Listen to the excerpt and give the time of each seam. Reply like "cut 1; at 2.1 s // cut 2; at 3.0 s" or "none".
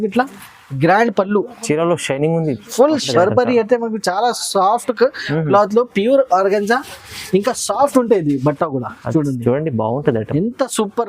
cut 1; at 3.1 s